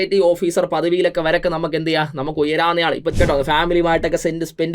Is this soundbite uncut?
no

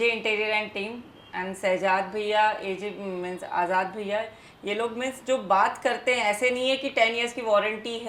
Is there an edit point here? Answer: no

